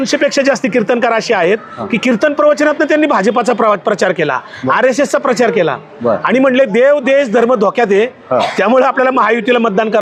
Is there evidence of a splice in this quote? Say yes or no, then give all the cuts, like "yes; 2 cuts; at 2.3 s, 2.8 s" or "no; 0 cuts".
no; 0 cuts